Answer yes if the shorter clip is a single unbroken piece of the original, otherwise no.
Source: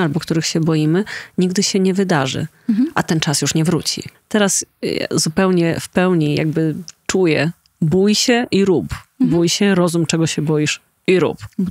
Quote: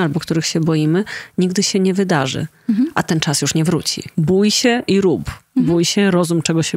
no